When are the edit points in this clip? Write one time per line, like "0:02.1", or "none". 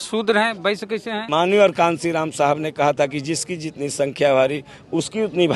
0:01.2